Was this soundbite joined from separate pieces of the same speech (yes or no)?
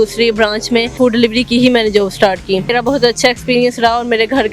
yes